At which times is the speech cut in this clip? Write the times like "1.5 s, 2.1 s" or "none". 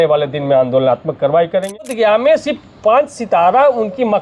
1.9 s

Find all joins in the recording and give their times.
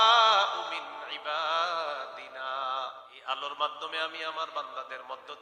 3.1 s

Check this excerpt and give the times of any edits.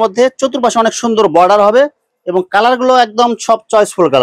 none

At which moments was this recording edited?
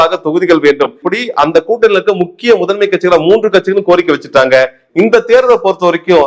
1.0 s, 4.8 s

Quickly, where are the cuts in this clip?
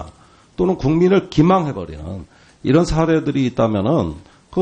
2.9 s

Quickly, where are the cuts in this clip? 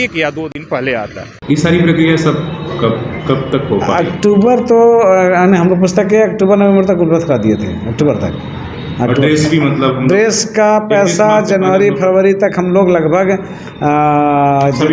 1.3 s

